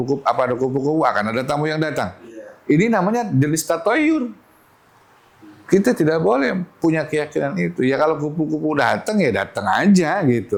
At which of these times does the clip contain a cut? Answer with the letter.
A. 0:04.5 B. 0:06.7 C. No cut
C